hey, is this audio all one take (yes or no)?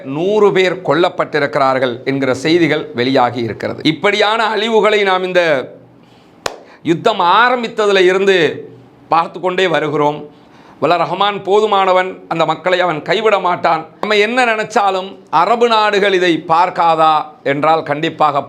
no